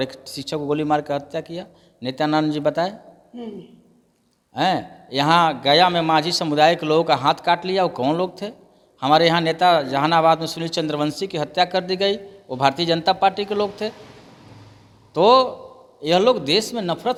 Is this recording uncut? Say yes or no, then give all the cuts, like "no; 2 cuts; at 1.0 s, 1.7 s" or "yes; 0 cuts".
yes; 0 cuts